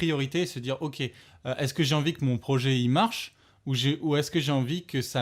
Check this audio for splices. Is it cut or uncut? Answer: uncut